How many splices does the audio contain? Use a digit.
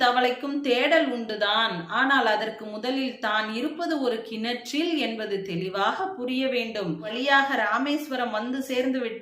1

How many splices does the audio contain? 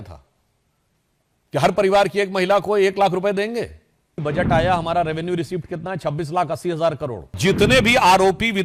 2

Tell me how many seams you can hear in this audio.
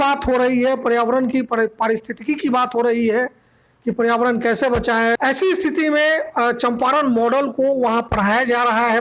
1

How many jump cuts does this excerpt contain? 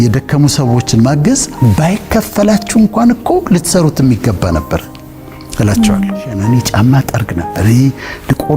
1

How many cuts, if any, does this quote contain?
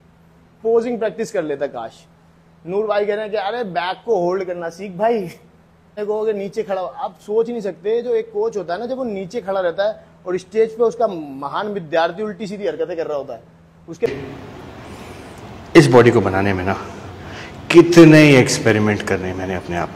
2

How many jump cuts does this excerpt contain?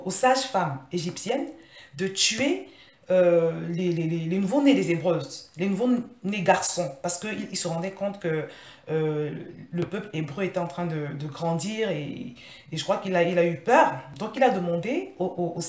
0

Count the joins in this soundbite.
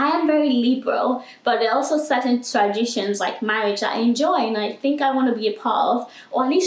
0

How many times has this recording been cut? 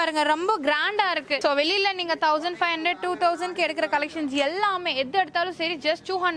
0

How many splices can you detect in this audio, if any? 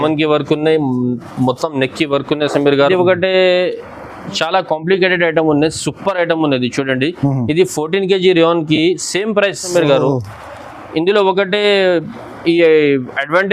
2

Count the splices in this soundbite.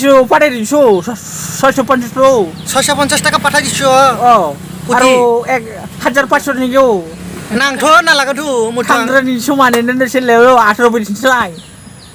0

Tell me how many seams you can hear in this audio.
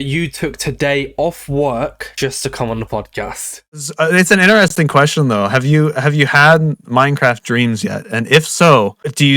1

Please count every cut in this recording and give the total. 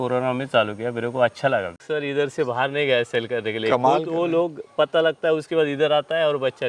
1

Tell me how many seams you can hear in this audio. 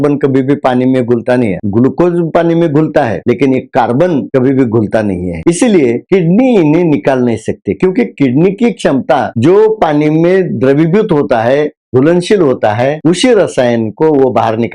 1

